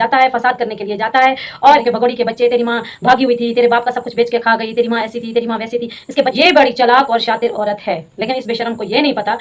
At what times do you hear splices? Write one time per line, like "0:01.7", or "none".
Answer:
0:01.8
0:06.3